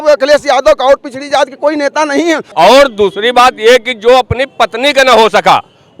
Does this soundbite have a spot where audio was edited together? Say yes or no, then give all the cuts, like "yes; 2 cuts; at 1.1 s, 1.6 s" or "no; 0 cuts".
yes; 1 cut; at 2.5 s